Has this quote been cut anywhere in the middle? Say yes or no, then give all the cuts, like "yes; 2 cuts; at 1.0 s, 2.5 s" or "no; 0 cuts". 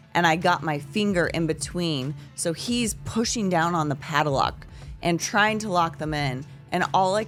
no; 0 cuts